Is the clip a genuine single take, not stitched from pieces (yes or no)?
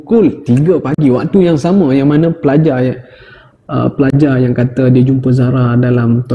yes